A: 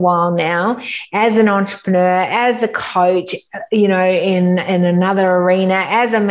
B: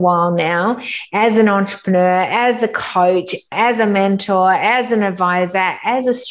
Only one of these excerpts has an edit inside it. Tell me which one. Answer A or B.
B